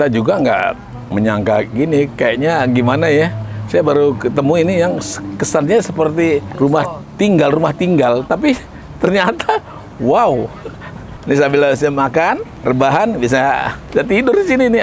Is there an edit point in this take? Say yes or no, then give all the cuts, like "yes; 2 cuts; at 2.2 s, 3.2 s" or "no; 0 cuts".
yes; 5 cuts; at 0.9 s, 6.5 s, 11.1 s, 12.5 s, 13.8 s